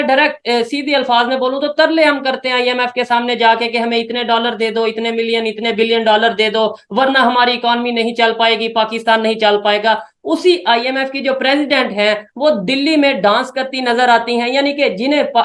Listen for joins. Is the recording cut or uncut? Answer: uncut